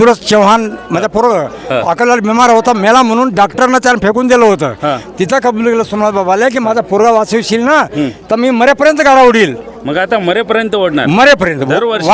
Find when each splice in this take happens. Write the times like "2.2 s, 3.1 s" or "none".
none